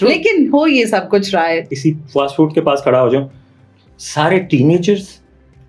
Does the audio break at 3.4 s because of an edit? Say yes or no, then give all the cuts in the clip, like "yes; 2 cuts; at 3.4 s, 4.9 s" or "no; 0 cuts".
no; 1 cut; at 1.7 s